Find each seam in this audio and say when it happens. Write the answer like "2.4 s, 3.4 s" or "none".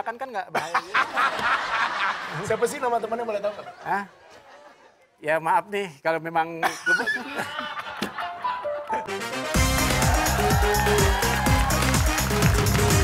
9.2 s